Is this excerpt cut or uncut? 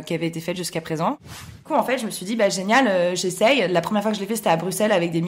cut